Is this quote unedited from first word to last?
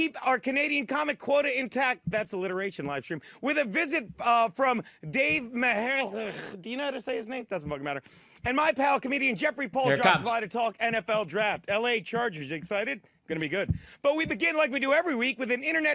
yes; 0 cuts

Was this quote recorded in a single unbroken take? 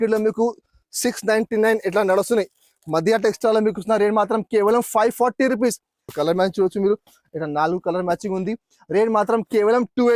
no; 1 cut; at 6.1 s

